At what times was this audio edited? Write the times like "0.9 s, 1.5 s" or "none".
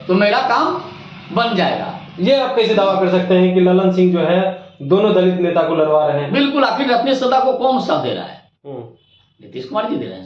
none